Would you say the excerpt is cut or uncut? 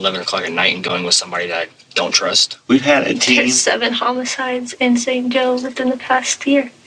cut